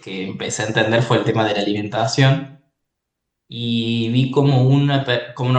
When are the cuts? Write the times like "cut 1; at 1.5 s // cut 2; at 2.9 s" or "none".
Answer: none